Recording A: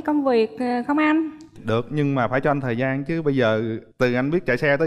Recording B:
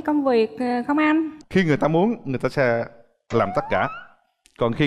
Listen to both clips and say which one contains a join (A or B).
B